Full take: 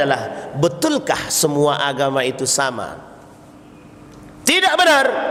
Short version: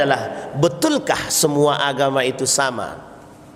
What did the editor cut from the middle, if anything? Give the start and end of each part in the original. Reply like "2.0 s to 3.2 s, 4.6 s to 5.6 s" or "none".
none

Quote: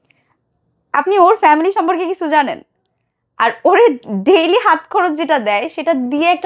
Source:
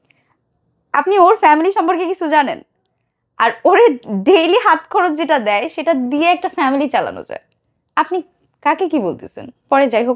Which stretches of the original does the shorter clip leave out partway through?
none

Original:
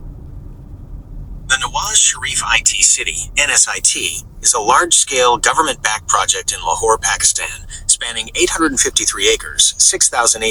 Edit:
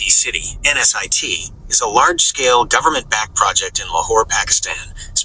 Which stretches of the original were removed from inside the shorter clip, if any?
none

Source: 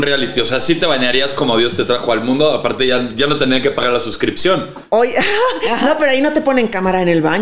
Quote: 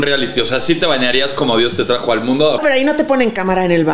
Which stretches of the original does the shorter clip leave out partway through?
2.6 s to 6.0 s

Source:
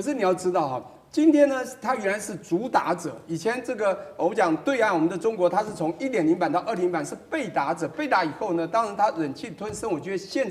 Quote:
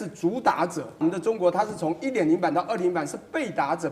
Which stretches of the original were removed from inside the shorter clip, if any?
3.3 s to 5.0 s

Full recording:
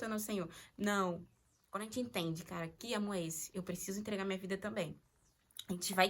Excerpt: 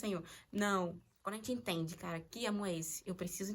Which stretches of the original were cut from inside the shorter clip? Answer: 1.3 s to 1.6 s

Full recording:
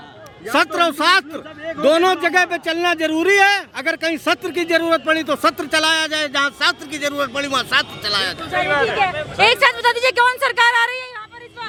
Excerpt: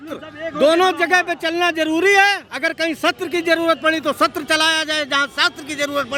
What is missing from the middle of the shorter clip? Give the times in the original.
none

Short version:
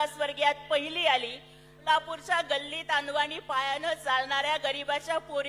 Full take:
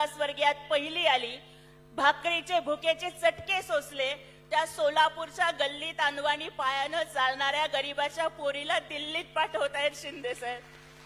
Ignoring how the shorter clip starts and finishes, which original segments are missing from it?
1.8 s to 4.9 s

